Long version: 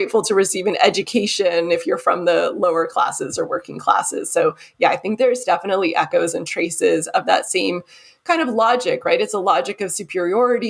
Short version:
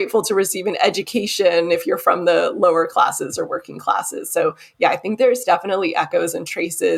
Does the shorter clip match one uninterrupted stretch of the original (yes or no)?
yes